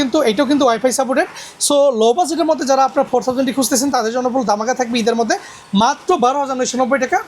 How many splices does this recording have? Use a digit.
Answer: 0